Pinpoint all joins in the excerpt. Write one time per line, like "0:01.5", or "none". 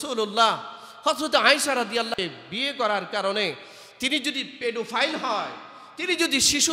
none